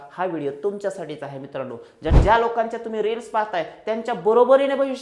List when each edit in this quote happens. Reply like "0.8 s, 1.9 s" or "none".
2.1 s